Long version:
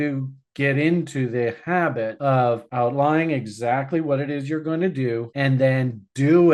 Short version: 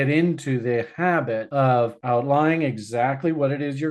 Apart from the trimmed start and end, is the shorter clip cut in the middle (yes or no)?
no